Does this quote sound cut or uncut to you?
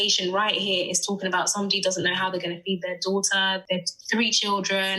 cut